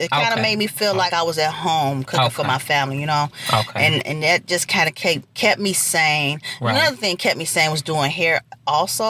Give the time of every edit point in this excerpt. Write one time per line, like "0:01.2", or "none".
0:01.1